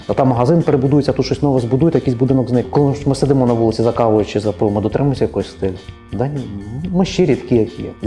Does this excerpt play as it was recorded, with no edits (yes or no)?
no